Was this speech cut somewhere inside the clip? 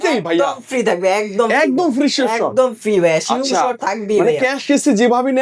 no; 0 cuts

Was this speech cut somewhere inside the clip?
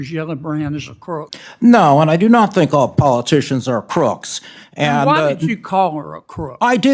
yes; 1 cut; at 1.4 s

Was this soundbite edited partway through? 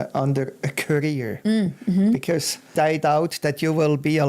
yes; 1 cut; at 2.7 s

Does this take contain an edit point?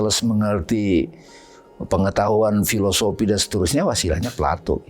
no; 0 cuts

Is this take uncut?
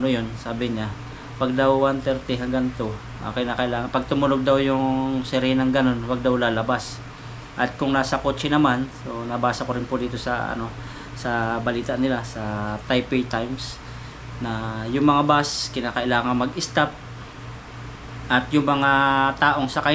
yes; 0 cuts

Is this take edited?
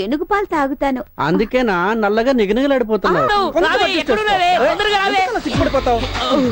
yes; 1 cut; at 3.3 s

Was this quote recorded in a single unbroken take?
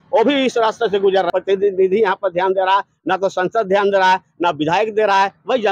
no; 1 cut; at 1.3 s

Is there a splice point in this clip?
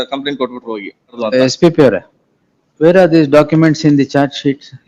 yes; 1 cut; at 1.2 s

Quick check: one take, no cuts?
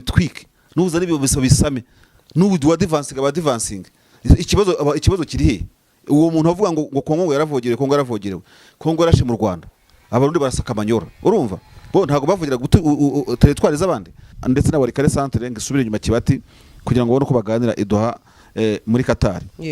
no; 1 cut; at 14.3 s

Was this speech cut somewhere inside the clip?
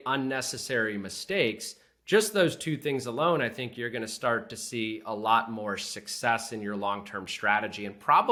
no; 0 cuts

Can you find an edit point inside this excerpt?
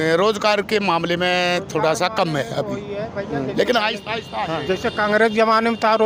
no; 0 cuts

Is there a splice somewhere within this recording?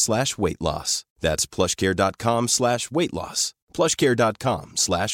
no; 0 cuts

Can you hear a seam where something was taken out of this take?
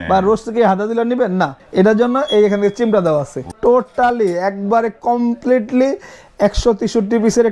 yes; 2 cuts; at 1.6 s, 3.5 s

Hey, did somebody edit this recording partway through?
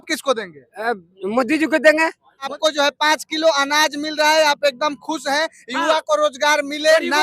yes; 1 cut; at 2.5 s

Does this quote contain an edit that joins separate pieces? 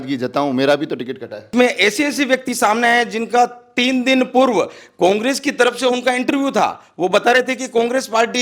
yes; 1 cut; at 1.5 s

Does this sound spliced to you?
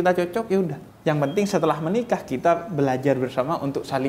no; 0 cuts

